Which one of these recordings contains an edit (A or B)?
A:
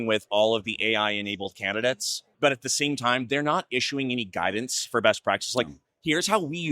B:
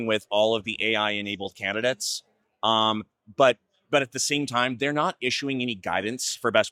A